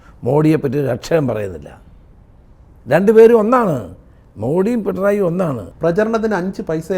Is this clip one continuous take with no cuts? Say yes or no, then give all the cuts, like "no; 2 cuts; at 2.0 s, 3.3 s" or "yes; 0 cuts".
no; 1 cut; at 5.7 s